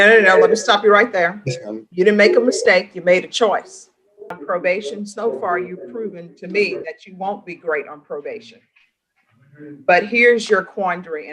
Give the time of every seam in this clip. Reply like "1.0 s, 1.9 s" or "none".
4.3 s